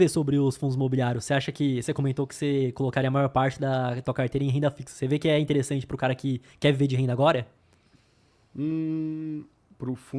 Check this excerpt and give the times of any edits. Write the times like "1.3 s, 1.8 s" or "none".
none